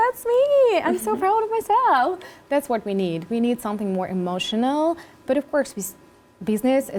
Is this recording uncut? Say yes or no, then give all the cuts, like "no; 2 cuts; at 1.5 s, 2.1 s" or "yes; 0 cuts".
yes; 0 cuts